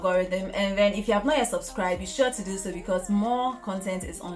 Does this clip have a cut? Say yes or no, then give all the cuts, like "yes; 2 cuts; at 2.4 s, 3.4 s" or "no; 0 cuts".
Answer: no; 0 cuts